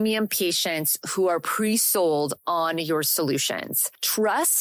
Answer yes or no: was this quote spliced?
no